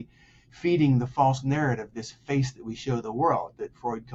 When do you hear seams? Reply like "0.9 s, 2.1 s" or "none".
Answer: none

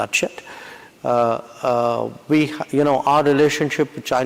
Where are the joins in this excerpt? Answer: none

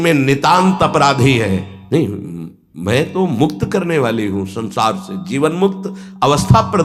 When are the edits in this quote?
none

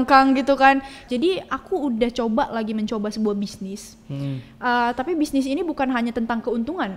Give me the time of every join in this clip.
1.0 s

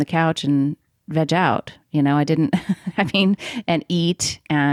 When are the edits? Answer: none

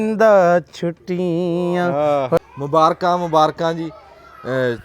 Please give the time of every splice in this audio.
2.4 s

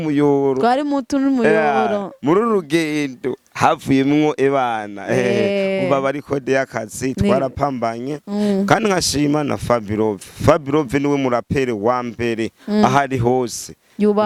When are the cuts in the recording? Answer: none

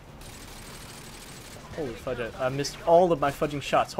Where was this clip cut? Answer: none

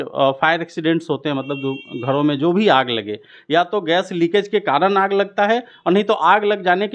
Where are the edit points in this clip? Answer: none

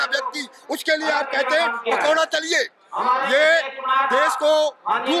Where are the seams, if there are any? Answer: none

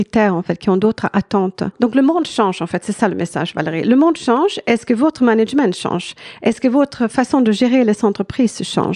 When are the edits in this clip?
1.7 s

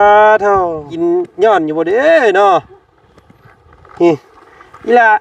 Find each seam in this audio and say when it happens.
0.9 s

